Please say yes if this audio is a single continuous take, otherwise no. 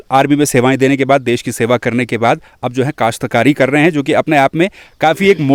yes